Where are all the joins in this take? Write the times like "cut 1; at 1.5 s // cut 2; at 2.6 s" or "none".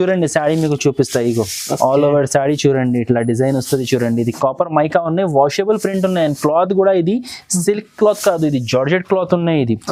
none